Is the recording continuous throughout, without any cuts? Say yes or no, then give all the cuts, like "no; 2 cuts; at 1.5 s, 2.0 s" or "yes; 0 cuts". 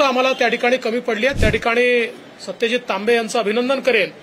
no; 1 cut; at 1.4 s